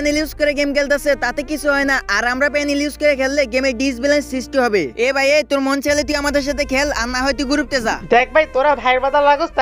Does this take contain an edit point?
no; 0 cuts

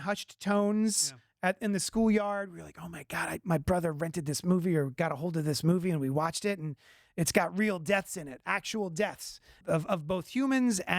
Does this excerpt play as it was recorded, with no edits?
no; 1 cut; at 9.6 s

